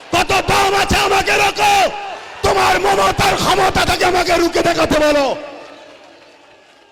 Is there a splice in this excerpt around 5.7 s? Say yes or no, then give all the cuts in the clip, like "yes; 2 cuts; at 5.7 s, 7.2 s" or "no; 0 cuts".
no; 0 cuts